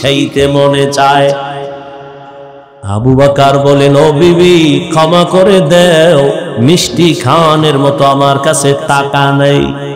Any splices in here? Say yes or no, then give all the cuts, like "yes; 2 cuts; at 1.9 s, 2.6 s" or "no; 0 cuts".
yes; 1 cut; at 2.7 s